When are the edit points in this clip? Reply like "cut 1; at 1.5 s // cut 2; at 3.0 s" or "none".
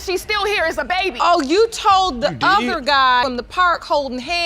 cut 1; at 1.2 s // cut 2; at 3.2 s